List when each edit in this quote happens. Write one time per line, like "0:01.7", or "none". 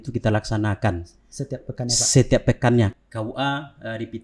0:02.9